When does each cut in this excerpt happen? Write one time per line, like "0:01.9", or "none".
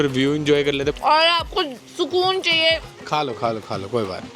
0:01.0
0:01.8